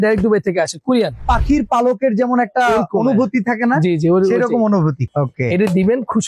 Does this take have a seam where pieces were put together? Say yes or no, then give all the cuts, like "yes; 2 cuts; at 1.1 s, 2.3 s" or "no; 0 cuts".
yes; 2 cuts; at 1.3 s, 5.0 s